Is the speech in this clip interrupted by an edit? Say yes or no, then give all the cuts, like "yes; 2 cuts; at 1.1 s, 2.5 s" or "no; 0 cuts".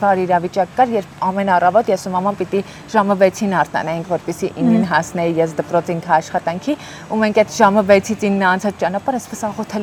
no; 0 cuts